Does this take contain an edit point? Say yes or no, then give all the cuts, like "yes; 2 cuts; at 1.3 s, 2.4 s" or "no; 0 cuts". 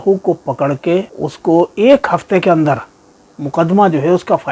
yes; 1 cut; at 1.2 s